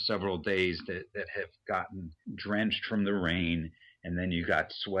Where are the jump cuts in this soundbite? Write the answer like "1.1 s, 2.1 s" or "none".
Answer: 2.2 s